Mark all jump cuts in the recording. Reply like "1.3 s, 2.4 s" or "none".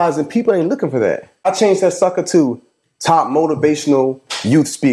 1.3 s